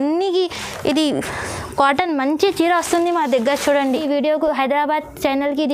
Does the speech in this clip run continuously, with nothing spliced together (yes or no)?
no